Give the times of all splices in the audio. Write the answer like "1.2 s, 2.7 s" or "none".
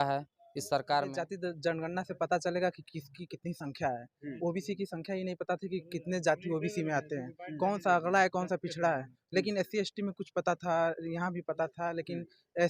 1.3 s

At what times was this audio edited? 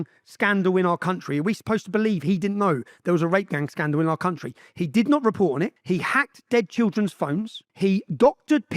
5.8 s, 7.6 s

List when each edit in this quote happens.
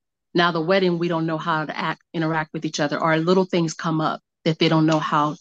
4.3 s

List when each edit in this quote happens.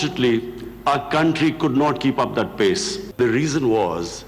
3.0 s

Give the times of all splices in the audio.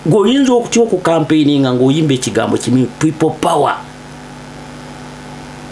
none

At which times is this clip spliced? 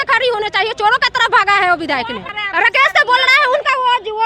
2.4 s

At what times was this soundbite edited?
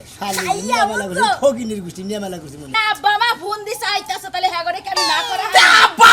2.8 s

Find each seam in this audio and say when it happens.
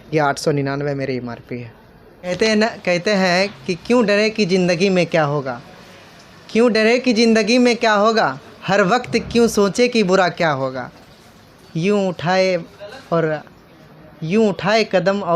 2.3 s

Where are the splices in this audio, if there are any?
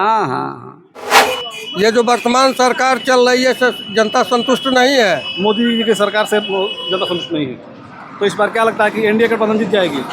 1.1 s

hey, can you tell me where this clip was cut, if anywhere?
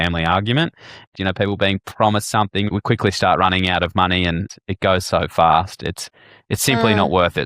1.1 s, 2.7 s, 4.5 s

